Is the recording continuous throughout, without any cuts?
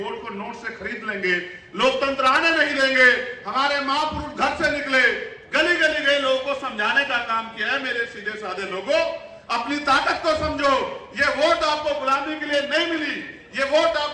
yes; 0 cuts

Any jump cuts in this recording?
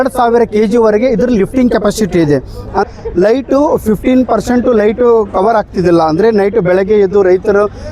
yes; 1 cut; at 2.8 s

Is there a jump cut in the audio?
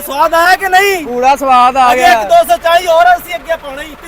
no; 0 cuts

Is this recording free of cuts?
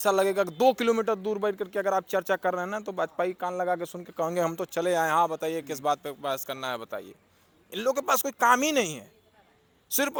yes; 0 cuts

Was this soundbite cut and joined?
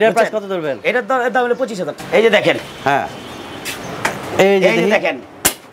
yes; 1 cut; at 2.0 s

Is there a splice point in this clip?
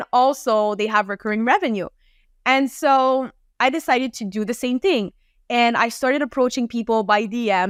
no; 0 cuts

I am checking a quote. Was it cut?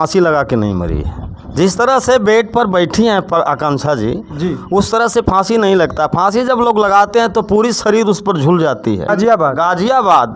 yes; 1 cut; at 9.1 s

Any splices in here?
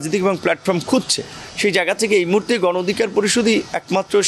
no; 0 cuts

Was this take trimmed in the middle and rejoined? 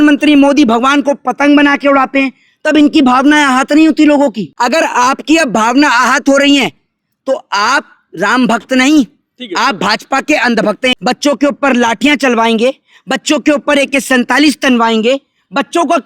yes; 2 cuts; at 4.5 s, 10.9 s

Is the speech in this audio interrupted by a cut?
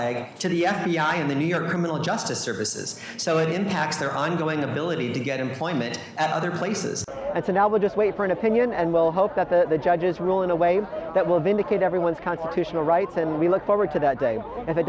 yes; 1 cut; at 7.1 s

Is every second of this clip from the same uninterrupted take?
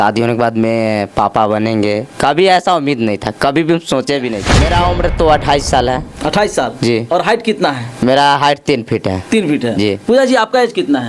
no; 1 cut; at 4.5 s

